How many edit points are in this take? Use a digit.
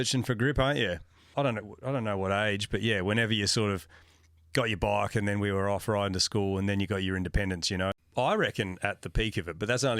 2